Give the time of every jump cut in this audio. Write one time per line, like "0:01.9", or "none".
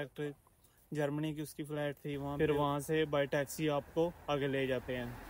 0:02.3

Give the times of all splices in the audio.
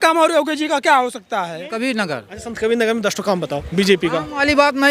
0:01.7

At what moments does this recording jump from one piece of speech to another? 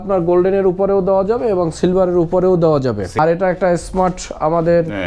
0:03.1

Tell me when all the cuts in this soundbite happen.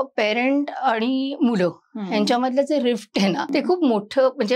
0:03.5

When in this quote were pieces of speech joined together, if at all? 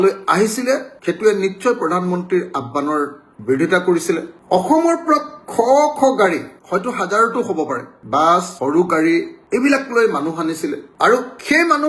0:00.9
0:04.3

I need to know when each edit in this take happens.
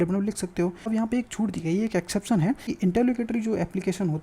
0:00.9
0:02.8

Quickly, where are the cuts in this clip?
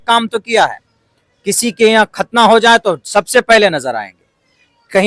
none

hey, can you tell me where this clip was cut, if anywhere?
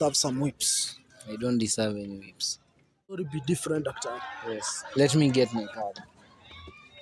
0:03.2

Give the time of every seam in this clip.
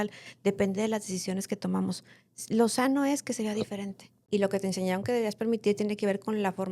0:04.1

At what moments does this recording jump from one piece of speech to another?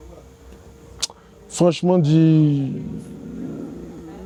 none

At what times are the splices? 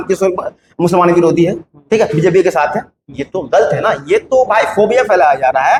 none

